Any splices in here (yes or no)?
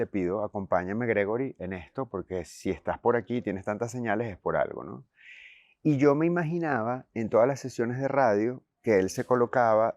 no